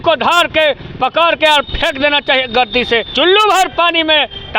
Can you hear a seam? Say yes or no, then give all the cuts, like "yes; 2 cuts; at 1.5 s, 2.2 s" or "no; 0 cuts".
yes; 1 cut; at 3.1 s